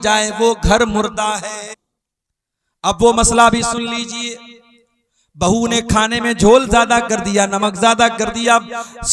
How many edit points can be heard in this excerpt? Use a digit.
1